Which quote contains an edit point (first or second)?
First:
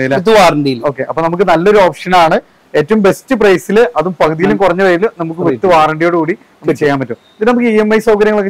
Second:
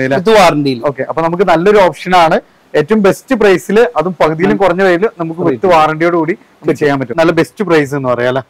second